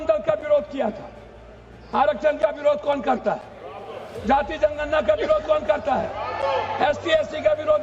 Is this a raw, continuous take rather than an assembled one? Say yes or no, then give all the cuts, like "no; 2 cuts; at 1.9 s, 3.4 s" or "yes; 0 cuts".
yes; 0 cuts